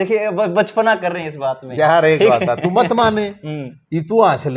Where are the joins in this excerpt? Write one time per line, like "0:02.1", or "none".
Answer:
none